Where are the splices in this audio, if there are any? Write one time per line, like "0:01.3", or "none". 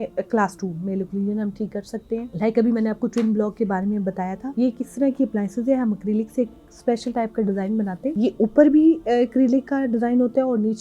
0:02.3
0:04.4
0:08.1

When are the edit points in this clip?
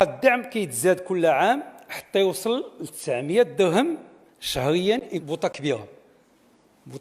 0:05.2

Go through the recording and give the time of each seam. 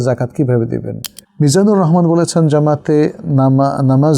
0:01.1

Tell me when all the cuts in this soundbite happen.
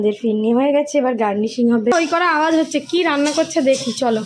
0:01.9

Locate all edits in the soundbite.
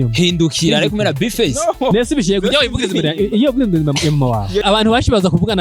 0:04.6

